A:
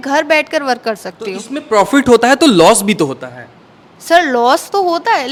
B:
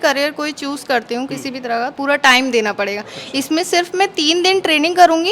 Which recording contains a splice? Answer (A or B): B